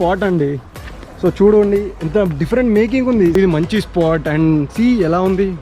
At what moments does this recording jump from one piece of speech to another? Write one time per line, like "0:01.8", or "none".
0:03.4